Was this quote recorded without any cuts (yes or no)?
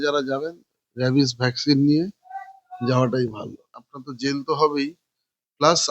no